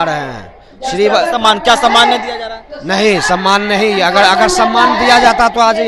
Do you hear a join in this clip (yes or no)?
no